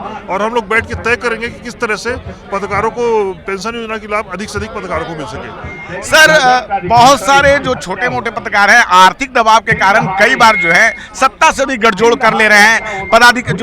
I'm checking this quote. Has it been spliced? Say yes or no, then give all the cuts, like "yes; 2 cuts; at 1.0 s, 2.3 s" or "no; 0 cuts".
yes; 1 cut; at 5.9 s